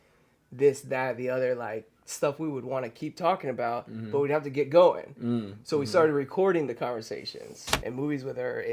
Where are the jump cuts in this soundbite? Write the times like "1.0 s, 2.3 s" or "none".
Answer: 7.6 s